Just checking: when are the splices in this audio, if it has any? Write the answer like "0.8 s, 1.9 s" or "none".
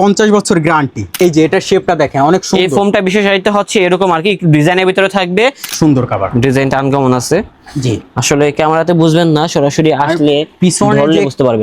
1.1 s, 5.7 s